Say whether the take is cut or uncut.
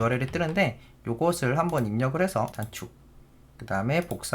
cut